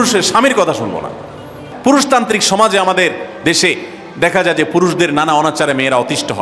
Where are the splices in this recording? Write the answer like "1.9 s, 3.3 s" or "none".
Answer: 1.6 s